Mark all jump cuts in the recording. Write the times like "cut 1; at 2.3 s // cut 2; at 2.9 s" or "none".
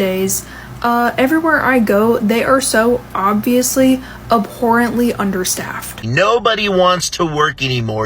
cut 1; at 6.0 s